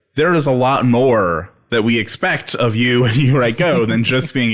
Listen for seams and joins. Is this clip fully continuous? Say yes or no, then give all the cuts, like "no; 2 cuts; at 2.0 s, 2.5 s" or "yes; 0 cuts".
yes; 0 cuts